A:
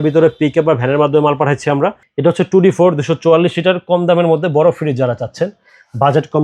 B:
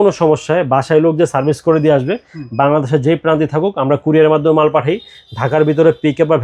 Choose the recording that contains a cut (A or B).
A